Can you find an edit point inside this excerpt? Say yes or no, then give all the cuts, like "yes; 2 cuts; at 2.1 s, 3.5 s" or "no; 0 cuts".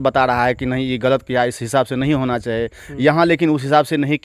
no; 0 cuts